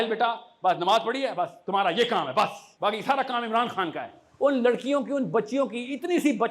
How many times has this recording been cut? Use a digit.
2